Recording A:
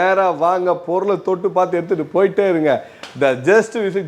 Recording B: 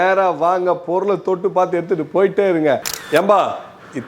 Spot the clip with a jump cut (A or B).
B